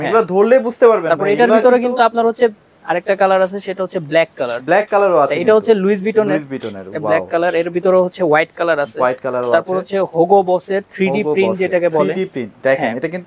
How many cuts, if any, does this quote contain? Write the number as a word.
zero